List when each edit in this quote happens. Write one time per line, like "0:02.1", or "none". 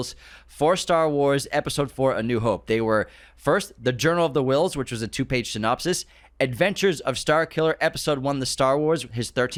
none